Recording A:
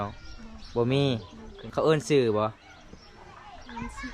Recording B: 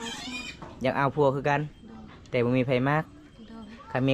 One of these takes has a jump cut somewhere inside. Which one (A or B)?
A